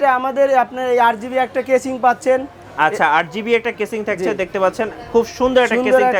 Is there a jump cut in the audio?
no; 0 cuts

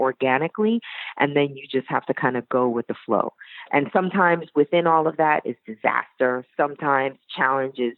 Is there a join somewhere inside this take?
no; 0 cuts

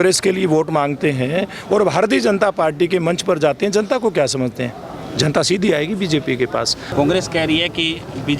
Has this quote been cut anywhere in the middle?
yes; 1 cut; at 6.9 s

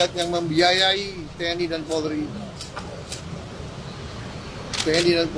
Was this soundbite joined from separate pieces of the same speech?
no; 0 cuts

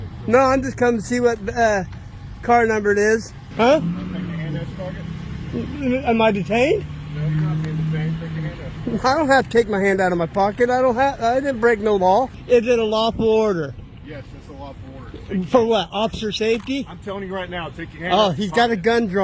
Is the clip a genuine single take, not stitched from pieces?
no; 2 cuts; at 3.4 s, 12.4 s

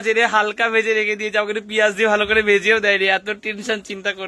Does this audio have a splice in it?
no; 0 cuts

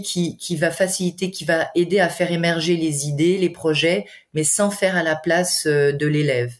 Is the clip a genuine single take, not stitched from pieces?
yes; 0 cuts

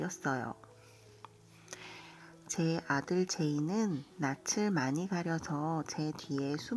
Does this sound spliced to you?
yes; 1 cut; at 1.1 s

